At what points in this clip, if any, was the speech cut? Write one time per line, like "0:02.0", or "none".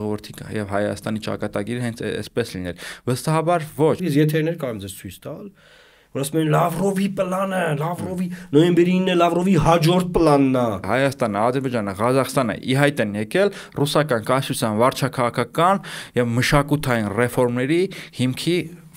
0:04.0
0:10.9